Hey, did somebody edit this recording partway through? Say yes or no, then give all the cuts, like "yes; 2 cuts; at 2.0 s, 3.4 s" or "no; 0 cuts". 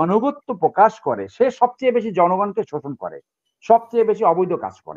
no; 0 cuts